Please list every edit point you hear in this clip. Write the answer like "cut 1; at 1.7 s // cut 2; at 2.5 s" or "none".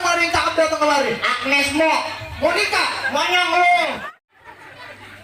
cut 1; at 4.1 s

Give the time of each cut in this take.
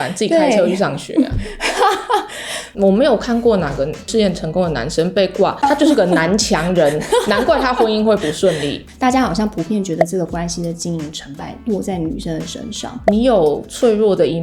cut 1; at 2.6 s // cut 2; at 8.8 s // cut 3; at 13.0 s

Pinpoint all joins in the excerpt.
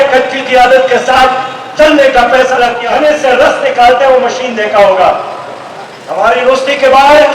cut 1; at 2.8 s

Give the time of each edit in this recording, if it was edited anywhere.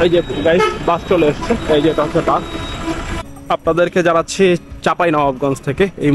cut 1; at 3.3 s

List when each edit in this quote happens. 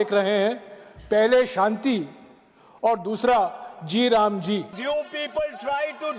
cut 1; at 4.8 s

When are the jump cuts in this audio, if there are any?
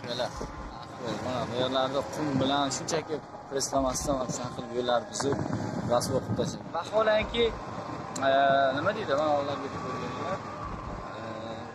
cut 1; at 0.8 s // cut 2; at 6.6 s

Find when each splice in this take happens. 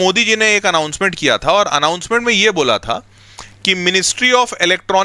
none

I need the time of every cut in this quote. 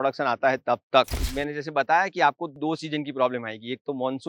cut 1; at 1.2 s // cut 2; at 2.5 s

